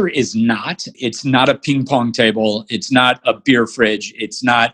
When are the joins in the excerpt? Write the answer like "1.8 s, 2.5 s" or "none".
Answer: 0.9 s